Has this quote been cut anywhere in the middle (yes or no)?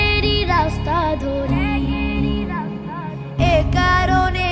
yes